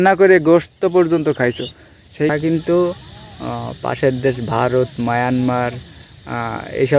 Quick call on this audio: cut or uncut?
cut